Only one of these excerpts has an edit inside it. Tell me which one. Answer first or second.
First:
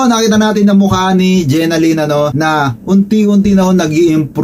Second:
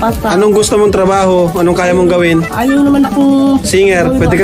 first